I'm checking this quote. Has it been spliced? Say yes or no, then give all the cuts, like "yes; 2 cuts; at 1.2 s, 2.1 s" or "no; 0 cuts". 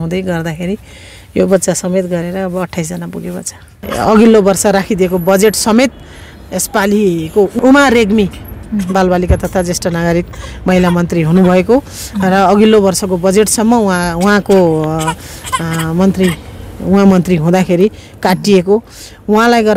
yes; 3 cuts; at 3.8 s, 7.6 s, 8.5 s